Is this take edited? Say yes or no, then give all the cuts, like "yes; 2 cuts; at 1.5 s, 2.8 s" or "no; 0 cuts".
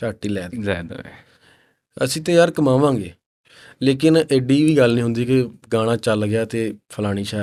no; 0 cuts